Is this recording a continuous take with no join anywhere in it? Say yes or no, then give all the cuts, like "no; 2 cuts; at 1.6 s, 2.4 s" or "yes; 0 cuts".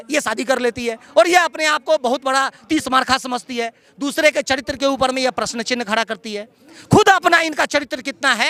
yes; 0 cuts